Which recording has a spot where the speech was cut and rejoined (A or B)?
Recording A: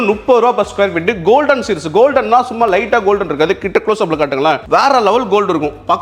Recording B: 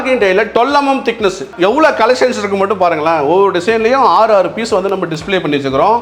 B